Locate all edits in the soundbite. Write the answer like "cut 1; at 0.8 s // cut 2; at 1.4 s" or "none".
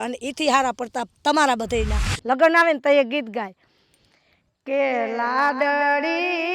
cut 1; at 2.1 s